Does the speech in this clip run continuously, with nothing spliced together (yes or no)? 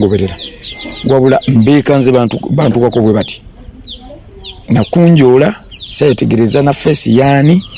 yes